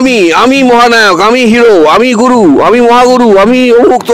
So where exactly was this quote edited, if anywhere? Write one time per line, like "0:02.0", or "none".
none